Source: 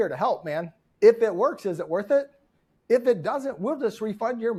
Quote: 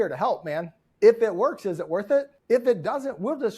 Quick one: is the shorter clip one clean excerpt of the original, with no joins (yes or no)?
no